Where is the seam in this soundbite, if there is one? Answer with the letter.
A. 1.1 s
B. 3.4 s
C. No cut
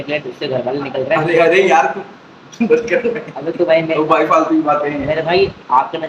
C